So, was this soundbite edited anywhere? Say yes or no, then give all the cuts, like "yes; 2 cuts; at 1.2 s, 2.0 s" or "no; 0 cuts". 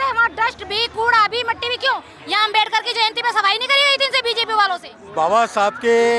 yes; 2 cuts; at 2.1 s, 5.0 s